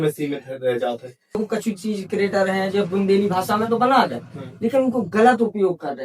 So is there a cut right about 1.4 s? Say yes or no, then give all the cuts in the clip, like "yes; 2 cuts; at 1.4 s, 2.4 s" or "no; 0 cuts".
yes; 1 cut; at 1.4 s